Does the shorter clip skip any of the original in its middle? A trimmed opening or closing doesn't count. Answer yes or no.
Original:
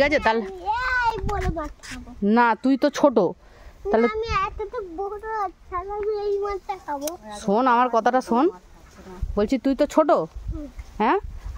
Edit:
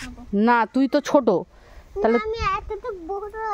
no